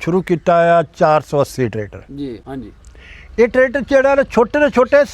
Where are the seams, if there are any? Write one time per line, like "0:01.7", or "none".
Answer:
0:03.0